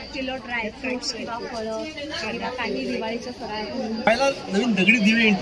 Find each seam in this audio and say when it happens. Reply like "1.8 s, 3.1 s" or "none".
4.1 s